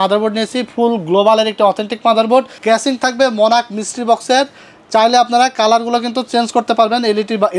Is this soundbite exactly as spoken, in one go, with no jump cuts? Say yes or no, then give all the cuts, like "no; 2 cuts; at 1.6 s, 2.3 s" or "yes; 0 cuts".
no; 1 cut; at 2.5 s